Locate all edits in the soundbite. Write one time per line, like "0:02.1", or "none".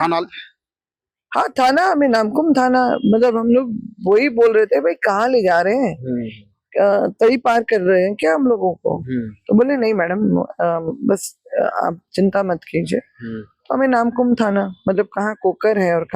none